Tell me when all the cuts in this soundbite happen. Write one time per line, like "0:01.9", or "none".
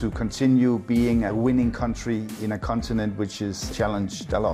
0:01.3
0:02.3
0:03.6